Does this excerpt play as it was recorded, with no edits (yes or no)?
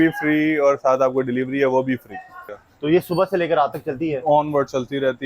no